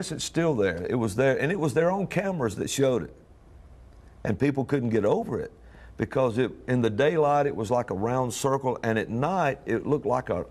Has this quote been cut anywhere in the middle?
no; 0 cuts

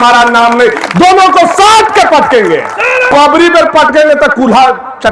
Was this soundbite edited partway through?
yes; 1 cut; at 3.3 s

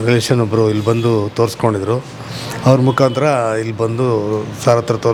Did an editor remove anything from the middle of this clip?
no; 0 cuts

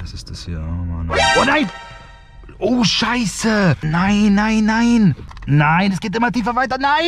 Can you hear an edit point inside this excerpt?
yes; 2 cuts; at 3.8 s, 5.2 s

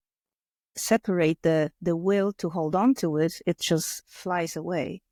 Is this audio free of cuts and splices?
yes; 0 cuts

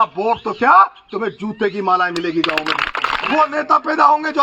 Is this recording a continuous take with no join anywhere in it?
no; 1 cut; at 3.2 s

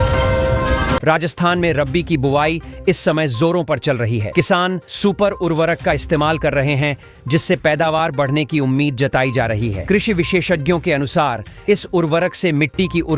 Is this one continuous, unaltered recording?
no; 1 cut; at 1.0 s

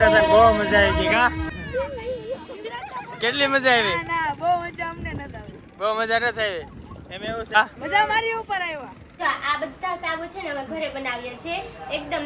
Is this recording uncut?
no; 3 cuts; at 1.5 s, 7.6 s, 9.0 s

